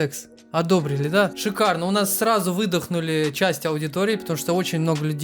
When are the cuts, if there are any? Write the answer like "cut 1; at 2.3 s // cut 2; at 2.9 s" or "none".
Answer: cut 1; at 1.4 s